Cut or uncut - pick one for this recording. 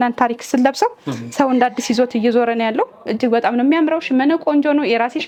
uncut